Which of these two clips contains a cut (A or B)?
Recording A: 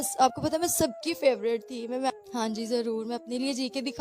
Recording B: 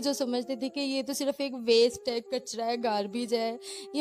A